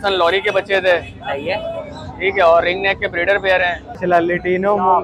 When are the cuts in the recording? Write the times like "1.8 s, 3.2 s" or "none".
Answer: 4.0 s